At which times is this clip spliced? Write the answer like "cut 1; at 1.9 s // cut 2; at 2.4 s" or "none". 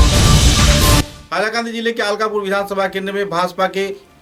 none